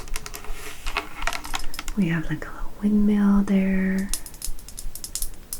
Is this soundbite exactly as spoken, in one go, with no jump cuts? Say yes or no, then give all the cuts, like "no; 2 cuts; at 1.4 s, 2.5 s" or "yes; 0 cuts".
no; 1 cut; at 1.8 s